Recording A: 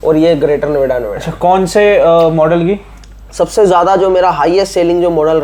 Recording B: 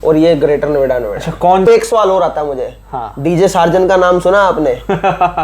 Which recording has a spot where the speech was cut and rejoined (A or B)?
B